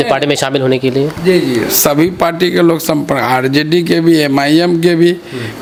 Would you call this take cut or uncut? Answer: uncut